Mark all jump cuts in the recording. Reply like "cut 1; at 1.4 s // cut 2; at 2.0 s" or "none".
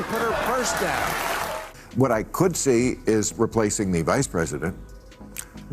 cut 1; at 1.6 s